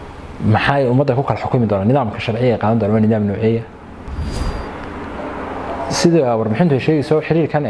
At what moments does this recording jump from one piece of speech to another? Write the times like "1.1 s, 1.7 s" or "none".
4.4 s